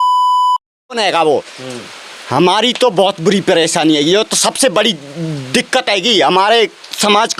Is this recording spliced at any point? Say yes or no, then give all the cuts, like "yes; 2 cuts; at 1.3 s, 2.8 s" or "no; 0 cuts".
yes; 1 cut; at 0.9 s